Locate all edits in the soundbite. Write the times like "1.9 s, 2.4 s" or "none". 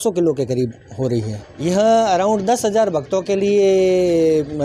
1.4 s